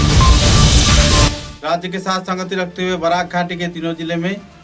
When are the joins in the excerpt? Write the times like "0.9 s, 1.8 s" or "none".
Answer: none